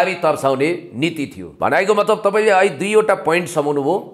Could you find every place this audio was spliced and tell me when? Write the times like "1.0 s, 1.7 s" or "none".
1.4 s